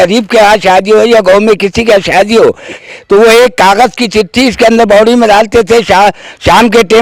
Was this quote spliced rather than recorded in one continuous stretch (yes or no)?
yes